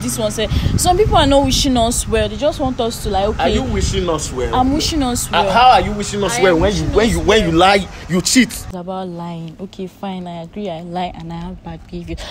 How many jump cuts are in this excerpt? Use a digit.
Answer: 1